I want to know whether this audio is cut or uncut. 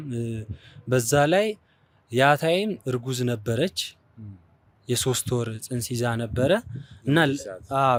uncut